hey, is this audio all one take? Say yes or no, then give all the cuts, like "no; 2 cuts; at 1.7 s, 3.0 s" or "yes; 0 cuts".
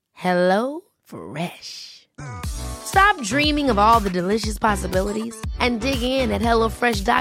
yes; 0 cuts